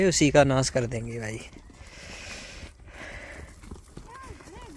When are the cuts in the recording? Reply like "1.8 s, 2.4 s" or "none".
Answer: none